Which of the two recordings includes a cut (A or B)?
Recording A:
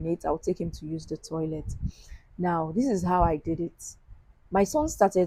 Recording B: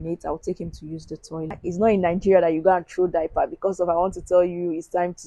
B